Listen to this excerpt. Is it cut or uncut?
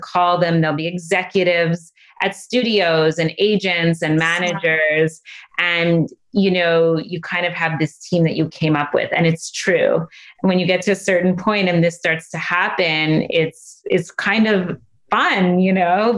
uncut